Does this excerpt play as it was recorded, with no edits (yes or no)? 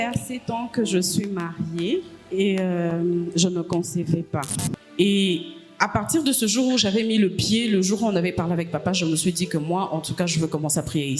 no